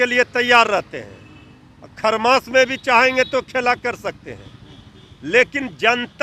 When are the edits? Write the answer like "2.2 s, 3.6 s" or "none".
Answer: none